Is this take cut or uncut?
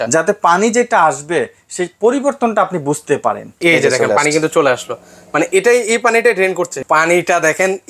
cut